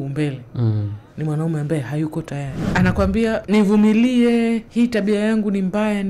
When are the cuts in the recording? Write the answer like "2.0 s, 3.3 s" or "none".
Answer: 2.6 s, 3.4 s, 4.7 s